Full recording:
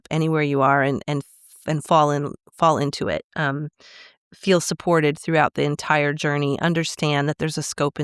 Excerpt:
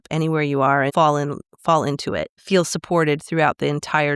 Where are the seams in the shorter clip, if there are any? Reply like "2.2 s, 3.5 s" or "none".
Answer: 0.9 s, 2.3 s